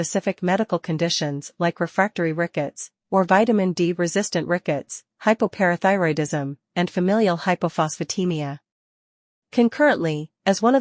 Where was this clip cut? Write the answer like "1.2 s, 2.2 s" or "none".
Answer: none